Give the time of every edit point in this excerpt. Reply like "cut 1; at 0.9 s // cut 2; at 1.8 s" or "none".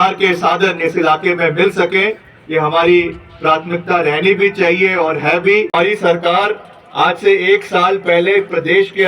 cut 1; at 5.8 s